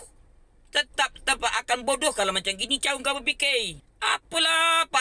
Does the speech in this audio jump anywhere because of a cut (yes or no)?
yes